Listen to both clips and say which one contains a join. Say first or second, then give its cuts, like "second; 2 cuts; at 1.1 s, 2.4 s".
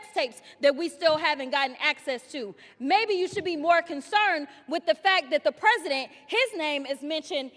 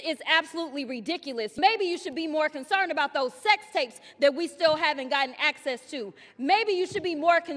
second; 1 cut; at 1.6 s